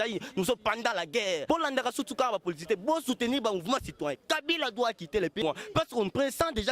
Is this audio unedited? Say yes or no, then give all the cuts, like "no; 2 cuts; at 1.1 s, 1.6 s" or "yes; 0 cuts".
no; 2 cuts; at 1.4 s, 5.4 s